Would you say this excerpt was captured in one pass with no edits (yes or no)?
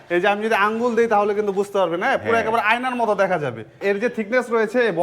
no